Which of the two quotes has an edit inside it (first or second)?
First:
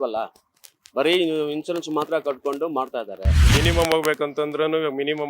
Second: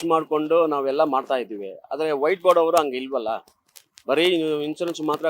first